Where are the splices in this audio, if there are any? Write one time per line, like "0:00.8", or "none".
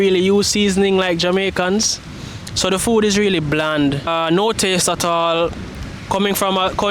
0:04.1